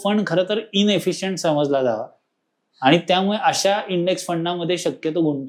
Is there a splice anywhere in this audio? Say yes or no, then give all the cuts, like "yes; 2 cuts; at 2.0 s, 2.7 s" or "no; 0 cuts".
no; 0 cuts